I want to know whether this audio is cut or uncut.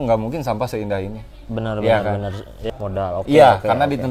cut